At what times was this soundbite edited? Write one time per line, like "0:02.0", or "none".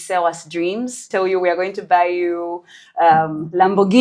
0:01.1